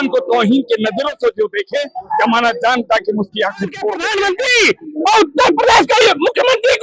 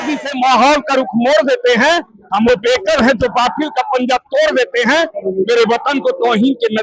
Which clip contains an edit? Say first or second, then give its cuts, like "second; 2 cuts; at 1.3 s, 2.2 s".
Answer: first; 1 cut; at 4.1 s